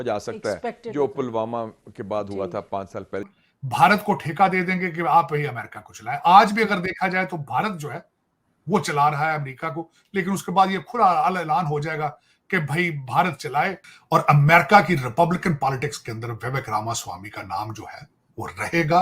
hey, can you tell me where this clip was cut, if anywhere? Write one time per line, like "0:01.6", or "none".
0:03.2
0:13.9